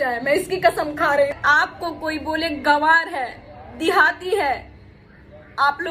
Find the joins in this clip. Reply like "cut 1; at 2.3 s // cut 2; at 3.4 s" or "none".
cut 1; at 1.4 s